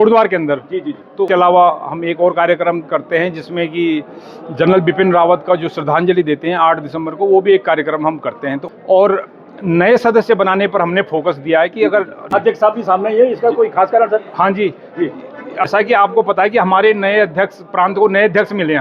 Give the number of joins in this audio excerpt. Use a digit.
4